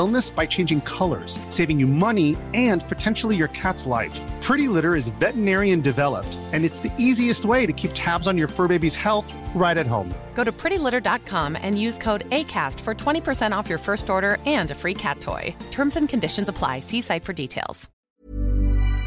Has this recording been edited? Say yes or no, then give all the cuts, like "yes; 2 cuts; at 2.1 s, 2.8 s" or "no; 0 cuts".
yes; 1 cut; at 18.0 s